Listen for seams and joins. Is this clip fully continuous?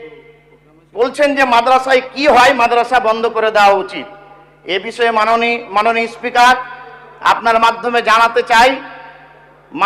yes; 0 cuts

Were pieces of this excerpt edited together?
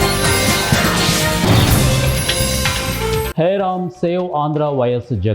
yes; 1 cut; at 3.3 s

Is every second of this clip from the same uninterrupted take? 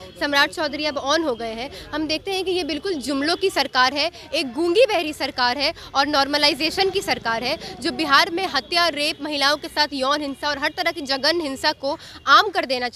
yes; 0 cuts

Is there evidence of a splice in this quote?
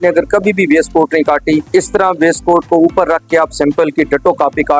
yes; 1 cut; at 1.6 s

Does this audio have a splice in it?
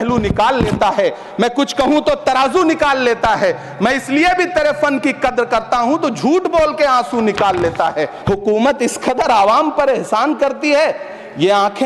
yes; 1 cut; at 8.1 s

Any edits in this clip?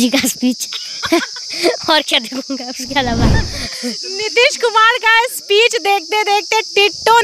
no; 0 cuts

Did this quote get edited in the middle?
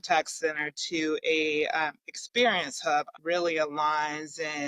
yes; 1 cut; at 3.1 s

